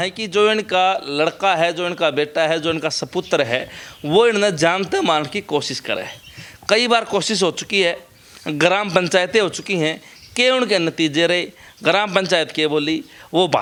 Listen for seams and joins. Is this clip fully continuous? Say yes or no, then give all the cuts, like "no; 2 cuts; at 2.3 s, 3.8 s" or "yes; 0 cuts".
yes; 0 cuts